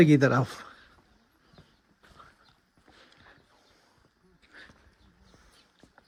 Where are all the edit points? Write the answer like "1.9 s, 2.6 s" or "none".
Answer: none